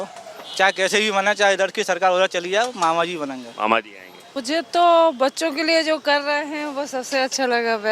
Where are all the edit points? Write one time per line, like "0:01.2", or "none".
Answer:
0:04.3